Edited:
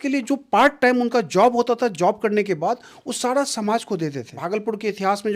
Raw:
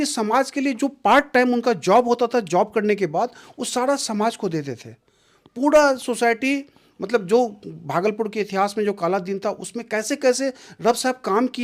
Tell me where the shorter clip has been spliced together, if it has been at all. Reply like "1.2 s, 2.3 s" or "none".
4.3 s